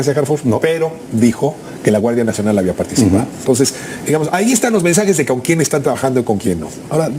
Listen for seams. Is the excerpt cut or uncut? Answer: uncut